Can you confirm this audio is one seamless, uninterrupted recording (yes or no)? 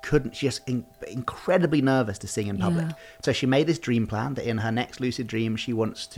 yes